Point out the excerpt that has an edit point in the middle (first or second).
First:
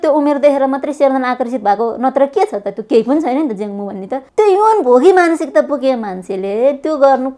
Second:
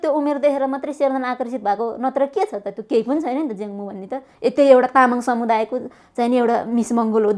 first